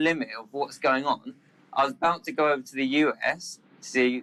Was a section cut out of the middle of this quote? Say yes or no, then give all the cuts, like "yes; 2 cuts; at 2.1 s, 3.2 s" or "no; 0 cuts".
no; 0 cuts